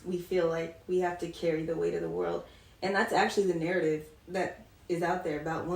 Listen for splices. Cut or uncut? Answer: uncut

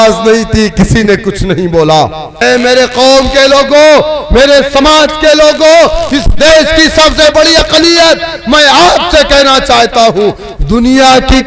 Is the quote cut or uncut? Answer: cut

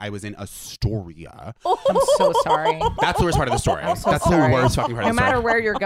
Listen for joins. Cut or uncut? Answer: uncut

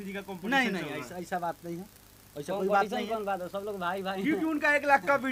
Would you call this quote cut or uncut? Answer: uncut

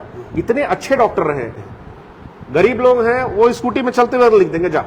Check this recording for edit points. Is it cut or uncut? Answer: cut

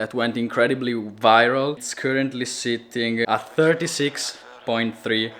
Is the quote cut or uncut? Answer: cut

